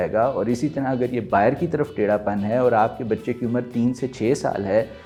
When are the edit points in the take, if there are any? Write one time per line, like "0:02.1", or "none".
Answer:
none

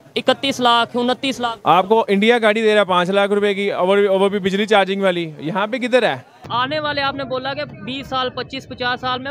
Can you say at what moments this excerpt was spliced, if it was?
0:06.4

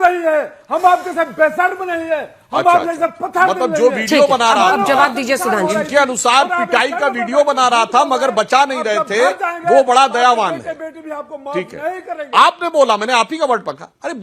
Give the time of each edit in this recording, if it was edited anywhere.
none

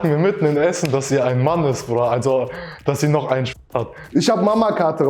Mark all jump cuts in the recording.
0:04.0

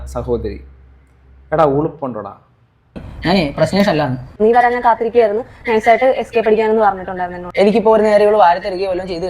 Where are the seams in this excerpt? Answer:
0:03.1

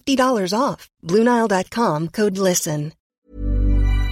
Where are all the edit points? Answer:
0:03.1

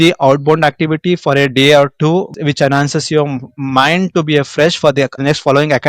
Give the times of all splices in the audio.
0:02.3

